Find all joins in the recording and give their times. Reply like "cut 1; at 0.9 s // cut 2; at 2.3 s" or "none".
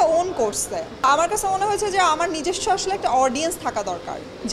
cut 1; at 1.0 s